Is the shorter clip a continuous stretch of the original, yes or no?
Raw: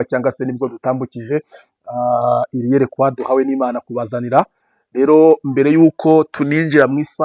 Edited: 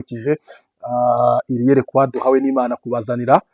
yes